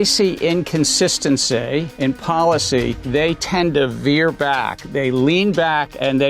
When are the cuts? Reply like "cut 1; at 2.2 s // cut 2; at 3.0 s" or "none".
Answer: cut 1; at 1.9 s // cut 2; at 3.0 s // cut 3; at 4.8 s